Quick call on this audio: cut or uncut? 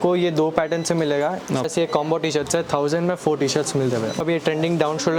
cut